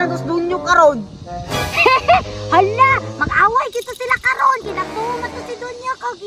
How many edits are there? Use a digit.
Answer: 0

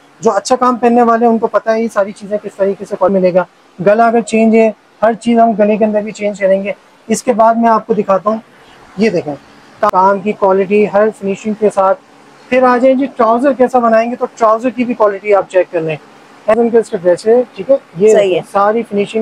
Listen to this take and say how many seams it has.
3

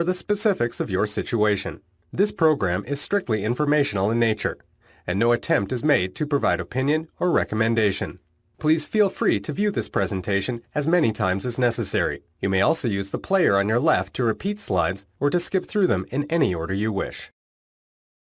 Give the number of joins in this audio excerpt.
1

